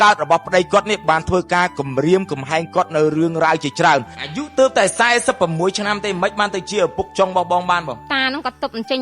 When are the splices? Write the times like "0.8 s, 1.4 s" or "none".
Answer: 4.2 s, 8.0 s